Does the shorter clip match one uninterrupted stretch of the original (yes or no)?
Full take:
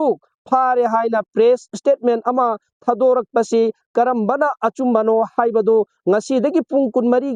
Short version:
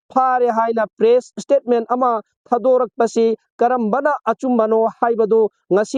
yes